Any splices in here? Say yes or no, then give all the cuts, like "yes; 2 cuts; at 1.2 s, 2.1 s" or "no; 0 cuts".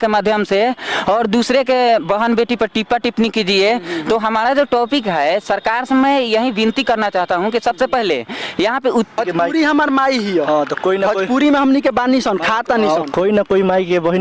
yes; 1 cut; at 9.2 s